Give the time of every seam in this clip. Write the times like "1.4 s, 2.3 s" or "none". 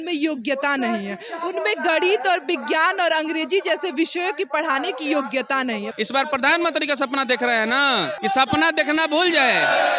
5.9 s, 8.2 s